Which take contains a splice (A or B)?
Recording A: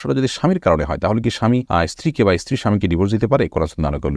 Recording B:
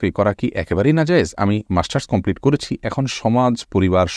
A